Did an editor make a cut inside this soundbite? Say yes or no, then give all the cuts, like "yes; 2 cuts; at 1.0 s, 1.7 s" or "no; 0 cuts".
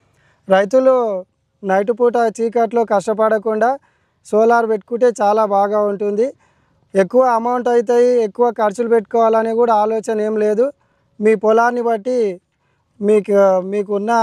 no; 0 cuts